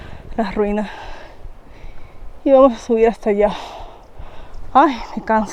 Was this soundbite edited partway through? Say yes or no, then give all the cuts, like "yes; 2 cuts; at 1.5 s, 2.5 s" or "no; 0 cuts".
no; 0 cuts